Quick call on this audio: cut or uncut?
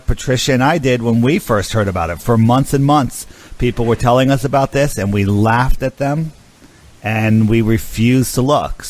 uncut